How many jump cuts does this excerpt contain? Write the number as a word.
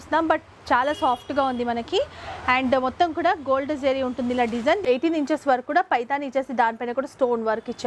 one